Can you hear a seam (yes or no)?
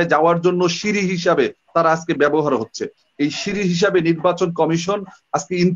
no